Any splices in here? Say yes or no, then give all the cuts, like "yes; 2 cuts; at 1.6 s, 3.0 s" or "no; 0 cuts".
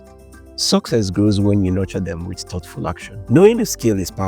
yes; 1 cut; at 3.1 s